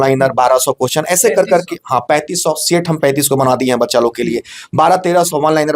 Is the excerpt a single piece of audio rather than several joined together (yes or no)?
yes